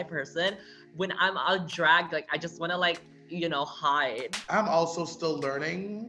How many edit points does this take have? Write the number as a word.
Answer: one